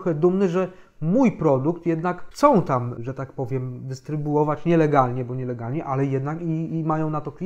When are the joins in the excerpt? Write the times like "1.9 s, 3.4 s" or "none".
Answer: 3.0 s